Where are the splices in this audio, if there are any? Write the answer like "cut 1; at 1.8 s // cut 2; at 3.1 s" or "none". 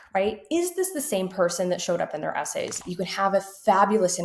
cut 1; at 2.9 s